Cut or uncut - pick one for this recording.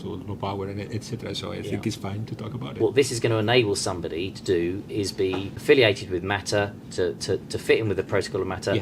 cut